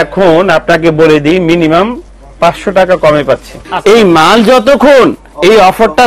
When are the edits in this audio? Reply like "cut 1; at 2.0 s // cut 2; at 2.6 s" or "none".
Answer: cut 1; at 3.6 s